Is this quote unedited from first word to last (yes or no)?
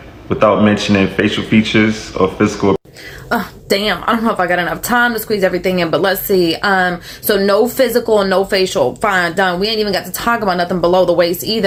yes